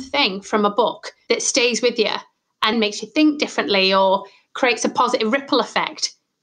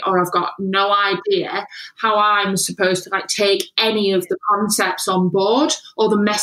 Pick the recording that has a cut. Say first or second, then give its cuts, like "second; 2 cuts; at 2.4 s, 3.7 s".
first; 2 cuts; at 1.1 s, 2.7 s